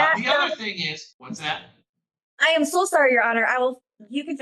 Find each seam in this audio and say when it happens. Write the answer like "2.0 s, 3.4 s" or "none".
1.1 s